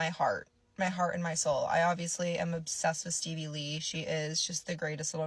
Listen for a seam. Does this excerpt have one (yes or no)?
no